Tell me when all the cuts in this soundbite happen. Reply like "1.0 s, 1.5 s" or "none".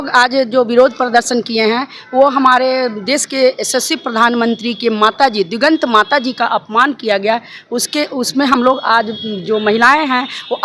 none